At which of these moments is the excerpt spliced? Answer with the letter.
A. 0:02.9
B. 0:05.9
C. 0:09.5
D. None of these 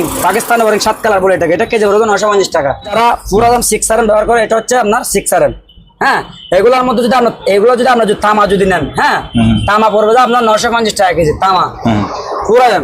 A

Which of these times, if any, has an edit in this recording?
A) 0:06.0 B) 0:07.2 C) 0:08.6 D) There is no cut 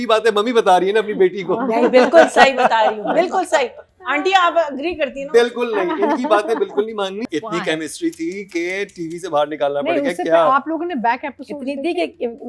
B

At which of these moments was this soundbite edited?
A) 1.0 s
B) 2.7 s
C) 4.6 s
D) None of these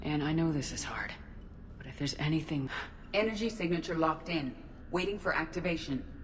B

